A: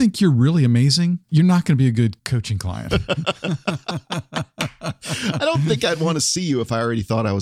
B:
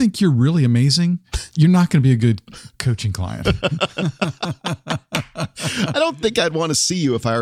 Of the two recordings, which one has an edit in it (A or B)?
A